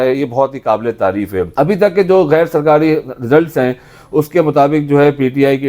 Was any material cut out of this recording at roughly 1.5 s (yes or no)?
yes